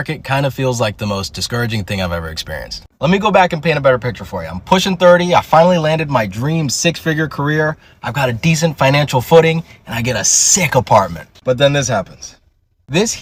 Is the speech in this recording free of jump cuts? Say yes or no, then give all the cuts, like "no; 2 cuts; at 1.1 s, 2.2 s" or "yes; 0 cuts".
yes; 0 cuts